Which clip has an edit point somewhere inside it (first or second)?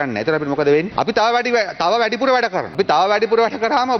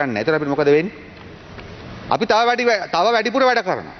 first